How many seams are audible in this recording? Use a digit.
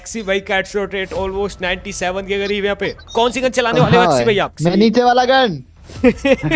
2